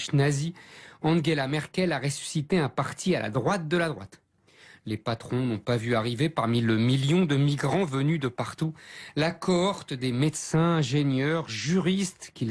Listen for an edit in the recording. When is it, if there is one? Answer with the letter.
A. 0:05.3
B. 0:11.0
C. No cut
A